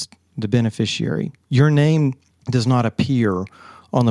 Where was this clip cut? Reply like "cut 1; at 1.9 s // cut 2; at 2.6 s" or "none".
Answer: none